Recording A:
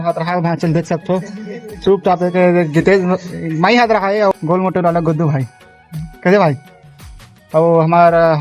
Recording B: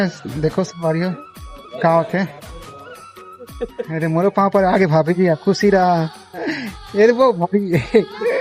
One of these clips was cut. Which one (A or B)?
A